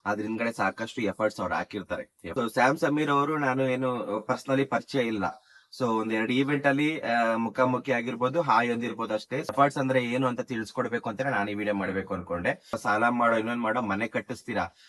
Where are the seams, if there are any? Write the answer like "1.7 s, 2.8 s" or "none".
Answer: 2.2 s, 9.5 s, 12.8 s

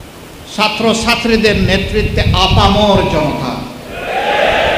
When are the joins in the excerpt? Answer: none

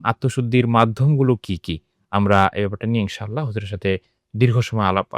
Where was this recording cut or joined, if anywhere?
none

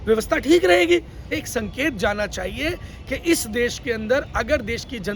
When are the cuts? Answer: 1.3 s

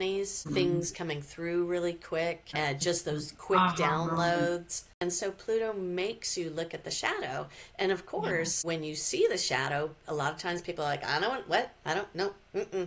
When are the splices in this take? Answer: 4.9 s

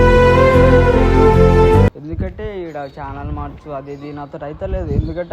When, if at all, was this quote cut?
2.0 s

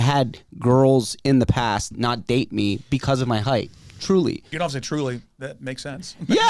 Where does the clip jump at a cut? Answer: 4.5 s

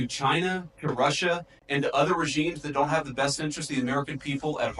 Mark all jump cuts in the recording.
none

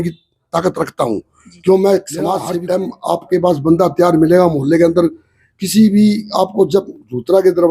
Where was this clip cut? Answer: 2.5 s

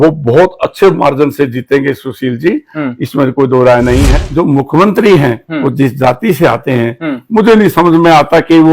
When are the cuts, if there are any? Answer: 4.2 s

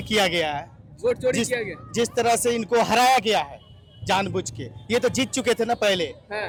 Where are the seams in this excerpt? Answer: none

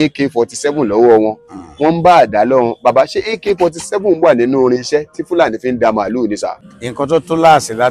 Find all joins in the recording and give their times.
6.7 s

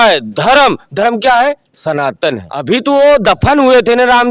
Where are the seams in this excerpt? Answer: 2.5 s

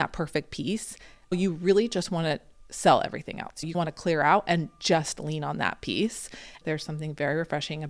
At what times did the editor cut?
1.3 s, 3.7 s, 6.6 s

